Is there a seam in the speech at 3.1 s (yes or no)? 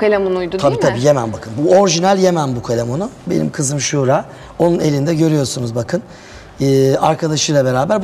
no